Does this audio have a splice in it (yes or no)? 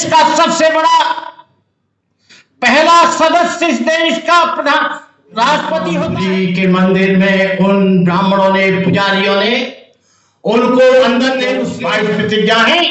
yes